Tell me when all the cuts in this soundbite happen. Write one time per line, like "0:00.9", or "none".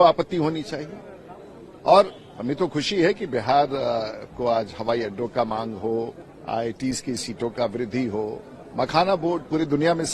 none